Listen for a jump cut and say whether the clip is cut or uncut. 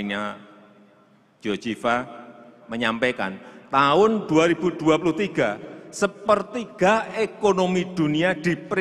uncut